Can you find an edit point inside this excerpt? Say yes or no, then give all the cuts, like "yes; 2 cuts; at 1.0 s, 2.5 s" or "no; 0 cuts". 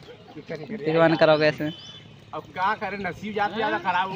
no; 0 cuts